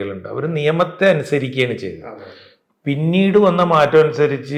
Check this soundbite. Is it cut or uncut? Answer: uncut